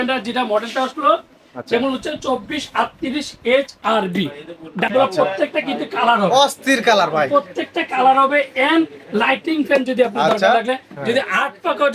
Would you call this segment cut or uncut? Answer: cut